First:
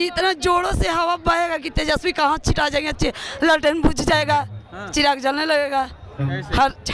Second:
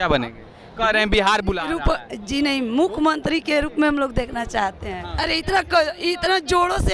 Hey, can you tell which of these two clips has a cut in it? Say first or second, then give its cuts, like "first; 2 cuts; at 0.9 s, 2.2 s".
second; 1 cut; at 5.1 s